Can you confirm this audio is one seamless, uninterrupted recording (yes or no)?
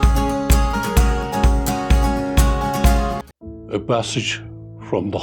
no